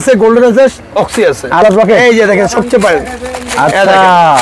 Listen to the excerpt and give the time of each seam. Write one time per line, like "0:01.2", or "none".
0:01.6